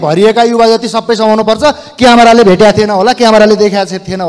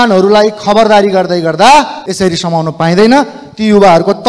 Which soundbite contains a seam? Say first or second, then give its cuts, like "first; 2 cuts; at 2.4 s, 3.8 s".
second; 1 cut; at 2.0 s